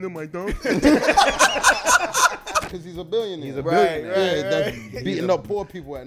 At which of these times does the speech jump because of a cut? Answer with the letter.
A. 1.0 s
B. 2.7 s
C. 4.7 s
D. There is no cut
B